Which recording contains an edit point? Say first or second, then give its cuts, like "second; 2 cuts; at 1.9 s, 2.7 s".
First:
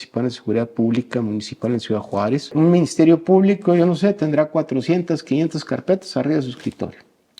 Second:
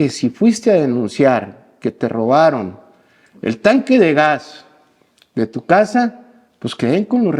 first; 1 cut; at 2.5 s